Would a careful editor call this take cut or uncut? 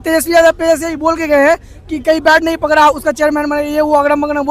uncut